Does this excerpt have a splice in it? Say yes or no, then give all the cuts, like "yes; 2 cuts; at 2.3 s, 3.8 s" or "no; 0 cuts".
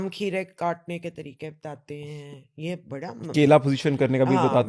no; 0 cuts